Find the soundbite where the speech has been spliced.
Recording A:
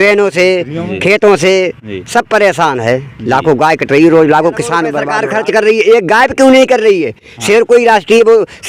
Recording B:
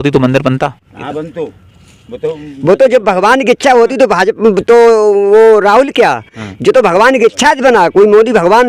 A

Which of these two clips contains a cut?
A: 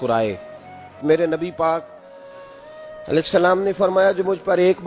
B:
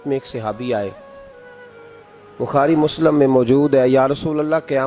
A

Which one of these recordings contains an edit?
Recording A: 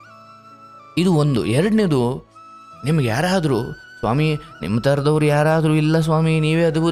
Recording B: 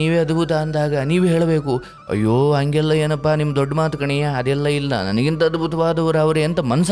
A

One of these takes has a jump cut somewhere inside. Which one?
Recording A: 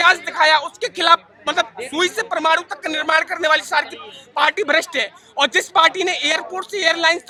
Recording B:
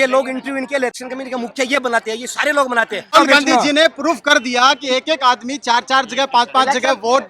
B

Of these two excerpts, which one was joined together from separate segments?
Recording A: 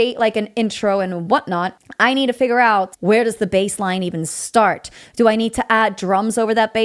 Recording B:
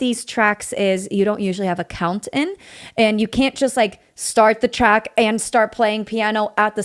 A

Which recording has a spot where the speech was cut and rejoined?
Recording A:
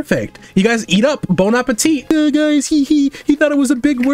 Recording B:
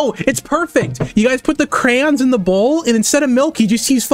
A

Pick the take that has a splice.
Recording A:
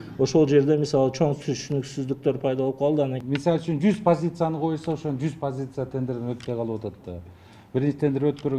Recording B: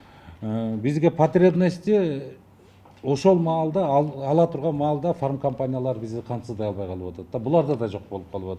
A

